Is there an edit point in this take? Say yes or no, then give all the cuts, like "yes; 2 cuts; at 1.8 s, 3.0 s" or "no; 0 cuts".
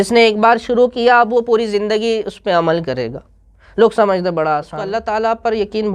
yes; 1 cut; at 4.8 s